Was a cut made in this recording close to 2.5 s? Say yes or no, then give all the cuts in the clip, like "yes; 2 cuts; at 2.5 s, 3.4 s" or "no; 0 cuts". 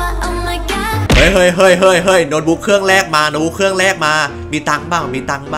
no; 1 cut; at 1.2 s